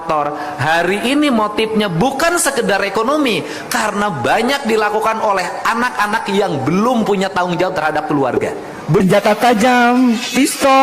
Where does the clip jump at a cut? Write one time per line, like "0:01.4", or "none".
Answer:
0:09.0